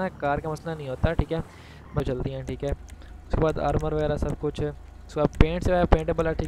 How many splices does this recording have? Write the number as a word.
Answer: one